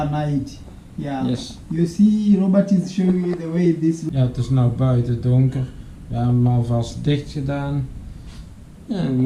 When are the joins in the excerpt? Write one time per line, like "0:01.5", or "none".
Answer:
0:04.0